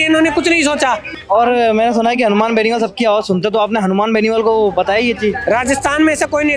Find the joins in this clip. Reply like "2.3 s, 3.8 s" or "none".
1.1 s